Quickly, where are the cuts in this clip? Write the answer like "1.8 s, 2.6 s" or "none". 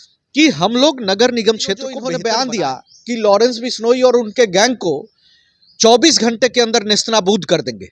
2.0 s